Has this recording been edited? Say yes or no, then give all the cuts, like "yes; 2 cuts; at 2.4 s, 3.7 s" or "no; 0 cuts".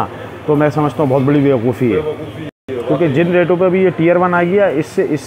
no; 0 cuts